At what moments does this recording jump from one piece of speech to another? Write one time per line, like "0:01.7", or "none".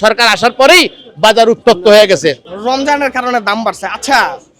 0:02.5